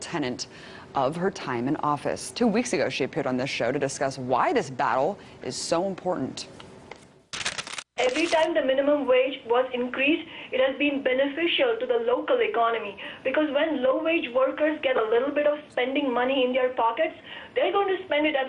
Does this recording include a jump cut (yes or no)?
no